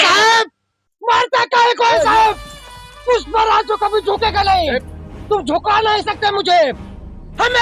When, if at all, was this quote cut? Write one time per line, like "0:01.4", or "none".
none